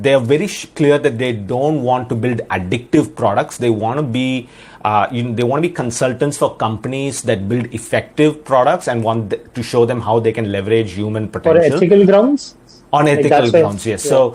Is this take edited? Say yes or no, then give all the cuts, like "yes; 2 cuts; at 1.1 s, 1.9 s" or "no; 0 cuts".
no; 0 cuts